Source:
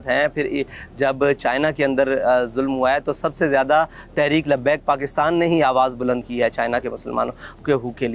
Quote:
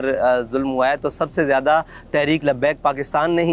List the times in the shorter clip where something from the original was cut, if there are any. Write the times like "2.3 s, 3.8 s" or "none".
none